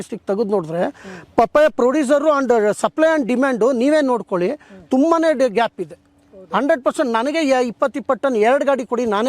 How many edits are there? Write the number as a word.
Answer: zero